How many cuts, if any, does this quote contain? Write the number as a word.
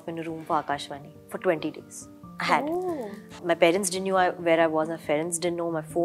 zero